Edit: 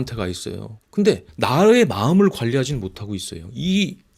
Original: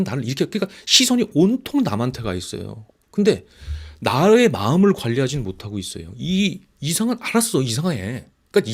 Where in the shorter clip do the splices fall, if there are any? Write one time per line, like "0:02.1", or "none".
0:00.9